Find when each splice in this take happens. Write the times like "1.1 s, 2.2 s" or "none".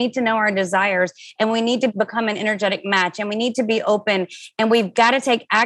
1.9 s